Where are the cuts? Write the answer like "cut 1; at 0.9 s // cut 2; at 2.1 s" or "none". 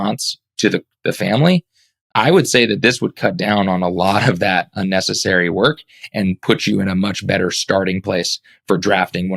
none